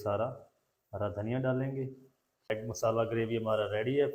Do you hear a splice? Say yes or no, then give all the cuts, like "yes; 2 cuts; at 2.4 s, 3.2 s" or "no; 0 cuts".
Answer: yes; 1 cut; at 2.5 s